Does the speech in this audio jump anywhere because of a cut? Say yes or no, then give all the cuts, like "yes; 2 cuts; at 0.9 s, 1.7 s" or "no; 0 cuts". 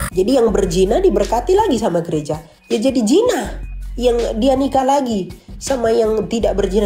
no; 0 cuts